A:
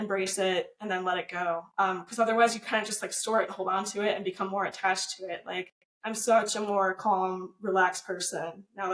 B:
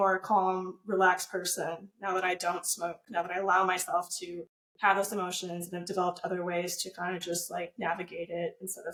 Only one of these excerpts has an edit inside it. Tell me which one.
A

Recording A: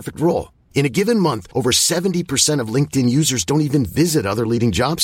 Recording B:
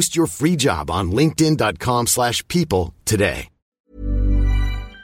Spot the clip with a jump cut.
B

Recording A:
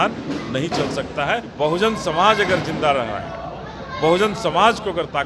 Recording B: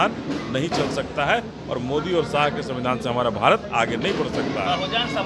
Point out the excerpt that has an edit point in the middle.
A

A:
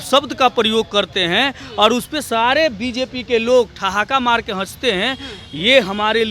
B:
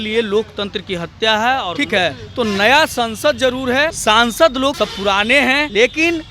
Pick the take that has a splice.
B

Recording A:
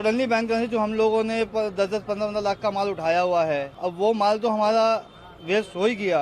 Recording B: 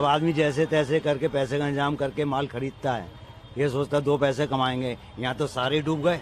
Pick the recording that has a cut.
A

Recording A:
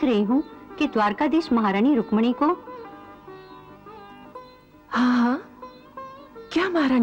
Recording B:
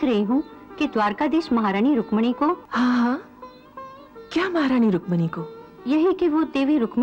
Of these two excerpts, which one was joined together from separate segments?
B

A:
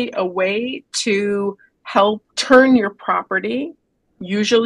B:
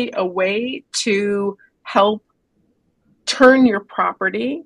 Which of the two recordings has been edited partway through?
A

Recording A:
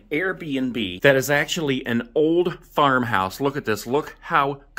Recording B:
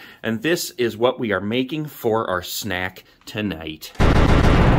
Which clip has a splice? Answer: B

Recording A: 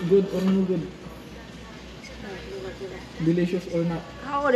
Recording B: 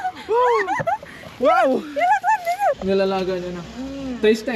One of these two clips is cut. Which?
B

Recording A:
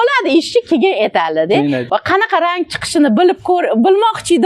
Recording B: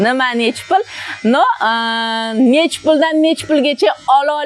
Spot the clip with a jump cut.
A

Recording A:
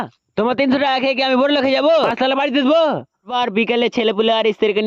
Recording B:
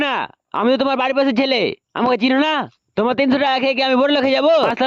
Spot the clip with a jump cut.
A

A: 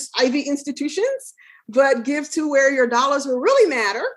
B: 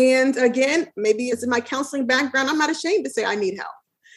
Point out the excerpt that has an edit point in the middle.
B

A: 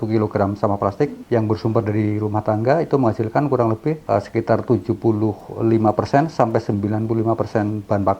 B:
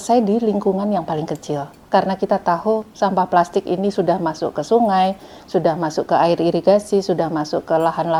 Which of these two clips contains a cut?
A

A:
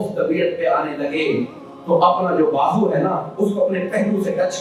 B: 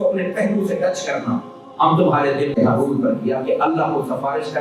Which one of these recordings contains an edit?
B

